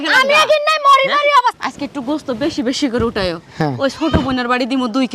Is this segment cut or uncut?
cut